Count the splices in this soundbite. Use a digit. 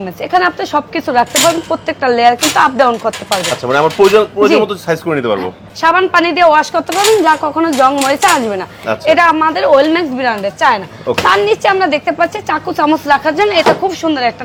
0